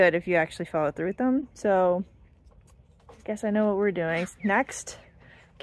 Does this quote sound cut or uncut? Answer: uncut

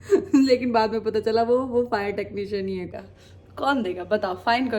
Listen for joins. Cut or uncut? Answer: cut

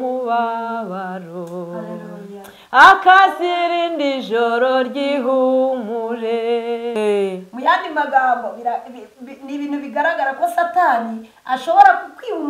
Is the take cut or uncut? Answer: cut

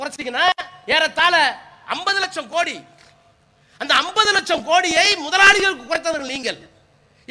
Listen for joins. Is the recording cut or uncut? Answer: uncut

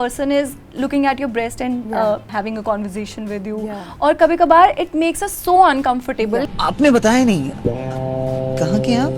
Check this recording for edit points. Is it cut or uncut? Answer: cut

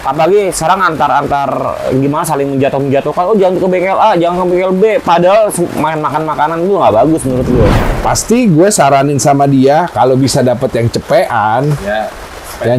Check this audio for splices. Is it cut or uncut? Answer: cut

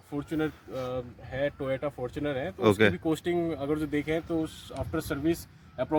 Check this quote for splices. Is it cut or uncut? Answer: uncut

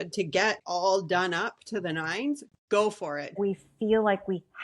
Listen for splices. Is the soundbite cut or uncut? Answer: cut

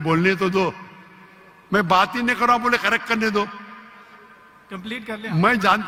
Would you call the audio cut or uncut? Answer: uncut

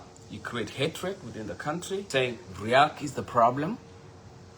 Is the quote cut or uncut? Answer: cut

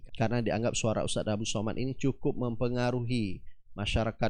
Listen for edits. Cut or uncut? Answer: uncut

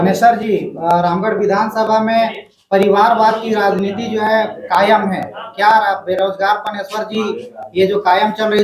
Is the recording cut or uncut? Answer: uncut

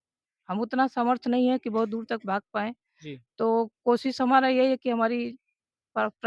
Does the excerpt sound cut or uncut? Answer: uncut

